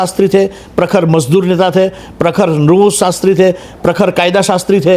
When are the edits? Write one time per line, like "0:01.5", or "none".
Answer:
none